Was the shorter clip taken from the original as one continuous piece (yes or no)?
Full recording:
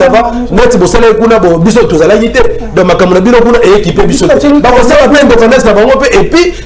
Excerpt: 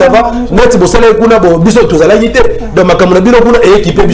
yes